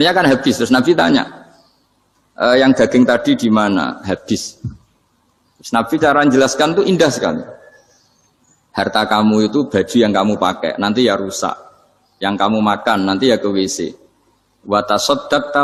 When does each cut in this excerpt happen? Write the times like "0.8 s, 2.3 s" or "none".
none